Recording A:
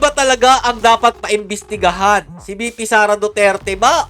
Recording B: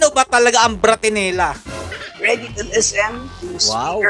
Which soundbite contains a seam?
B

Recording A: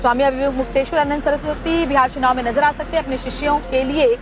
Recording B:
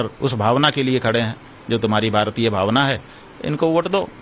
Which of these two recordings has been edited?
A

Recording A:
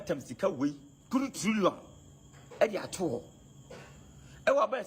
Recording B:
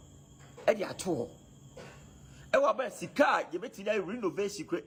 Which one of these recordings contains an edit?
A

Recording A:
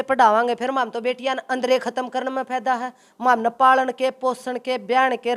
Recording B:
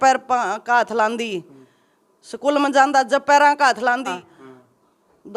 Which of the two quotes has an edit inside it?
B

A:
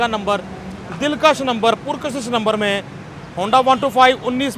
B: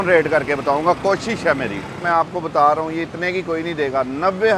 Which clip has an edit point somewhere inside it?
B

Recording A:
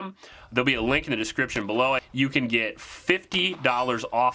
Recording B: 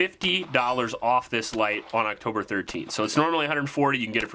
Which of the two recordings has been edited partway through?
A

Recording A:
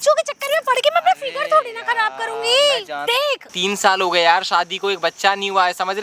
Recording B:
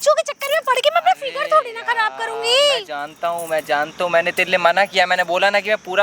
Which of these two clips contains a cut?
A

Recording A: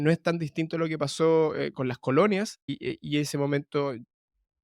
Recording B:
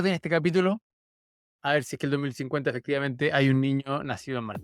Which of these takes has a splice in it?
A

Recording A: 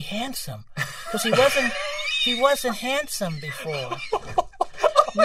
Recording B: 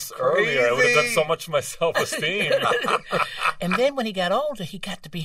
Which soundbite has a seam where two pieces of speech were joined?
B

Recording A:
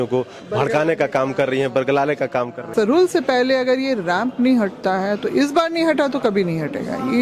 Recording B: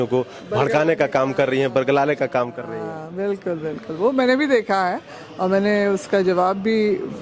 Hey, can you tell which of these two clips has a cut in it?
A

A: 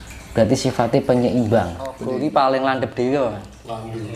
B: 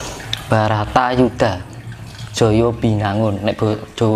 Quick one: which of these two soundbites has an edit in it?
A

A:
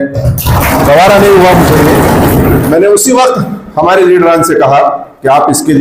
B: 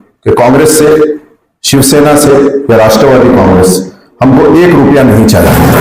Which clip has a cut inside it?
A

